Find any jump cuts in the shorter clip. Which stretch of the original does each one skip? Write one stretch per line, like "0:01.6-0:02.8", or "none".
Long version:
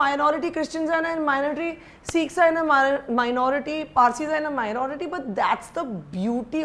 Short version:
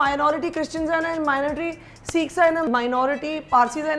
0:02.6-0:03.1